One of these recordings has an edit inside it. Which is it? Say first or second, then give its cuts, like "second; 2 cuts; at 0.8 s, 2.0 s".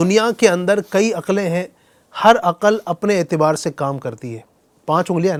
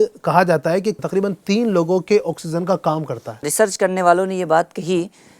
second; 2 cuts; at 1.0 s, 3.5 s